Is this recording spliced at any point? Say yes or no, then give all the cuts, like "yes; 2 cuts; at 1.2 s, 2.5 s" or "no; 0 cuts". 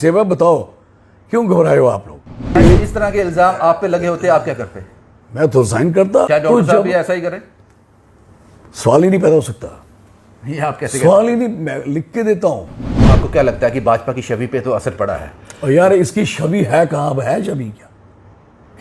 yes; 3 cuts; at 2.6 s, 6.3 s, 13.0 s